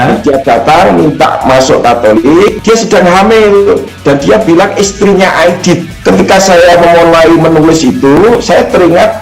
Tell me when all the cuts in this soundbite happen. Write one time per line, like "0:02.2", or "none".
0:02.6
0:03.9
0:05.9